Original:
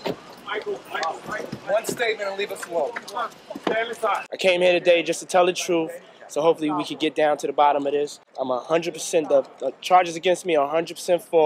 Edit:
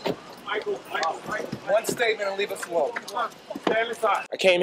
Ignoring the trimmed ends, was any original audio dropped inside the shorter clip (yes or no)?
no